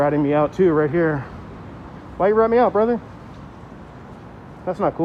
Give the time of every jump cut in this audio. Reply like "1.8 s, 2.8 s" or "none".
none